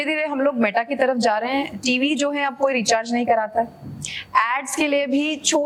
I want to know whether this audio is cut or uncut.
uncut